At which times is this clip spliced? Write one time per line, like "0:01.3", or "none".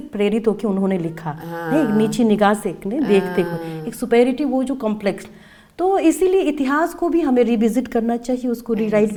none